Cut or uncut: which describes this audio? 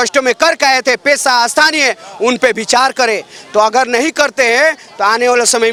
uncut